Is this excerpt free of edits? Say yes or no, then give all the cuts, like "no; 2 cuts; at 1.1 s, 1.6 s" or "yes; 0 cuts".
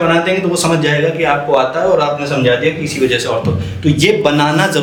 yes; 0 cuts